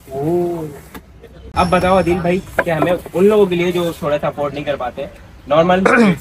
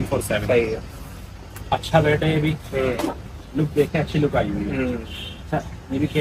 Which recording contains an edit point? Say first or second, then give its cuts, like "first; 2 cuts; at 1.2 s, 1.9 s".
first; 1 cut; at 1.7 s